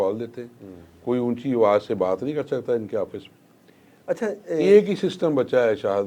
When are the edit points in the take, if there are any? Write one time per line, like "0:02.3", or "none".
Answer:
none